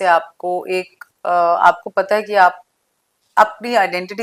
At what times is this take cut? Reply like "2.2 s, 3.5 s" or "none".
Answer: none